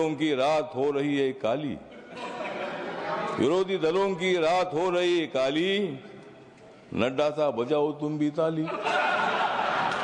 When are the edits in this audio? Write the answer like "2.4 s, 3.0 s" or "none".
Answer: none